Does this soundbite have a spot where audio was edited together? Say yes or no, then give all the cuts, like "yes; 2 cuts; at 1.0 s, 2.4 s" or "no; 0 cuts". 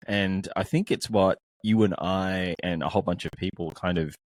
no; 0 cuts